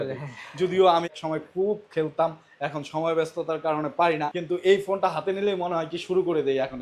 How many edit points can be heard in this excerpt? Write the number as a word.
two